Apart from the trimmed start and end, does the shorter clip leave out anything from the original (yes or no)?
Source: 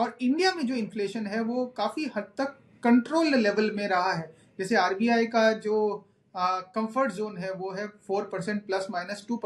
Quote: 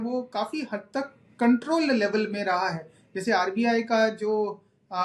no